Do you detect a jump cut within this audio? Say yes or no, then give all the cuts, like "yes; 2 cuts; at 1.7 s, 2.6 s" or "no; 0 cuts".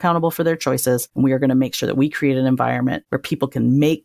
yes; 2 cuts; at 1.1 s, 3.1 s